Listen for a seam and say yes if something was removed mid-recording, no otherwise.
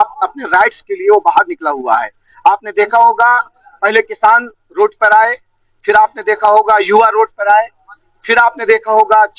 no